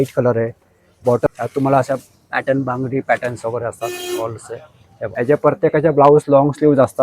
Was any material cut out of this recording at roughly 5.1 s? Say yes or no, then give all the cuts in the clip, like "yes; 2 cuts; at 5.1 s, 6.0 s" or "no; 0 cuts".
yes; 2 cuts; at 1.3 s, 5.1 s